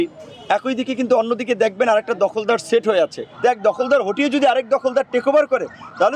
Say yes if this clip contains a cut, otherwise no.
yes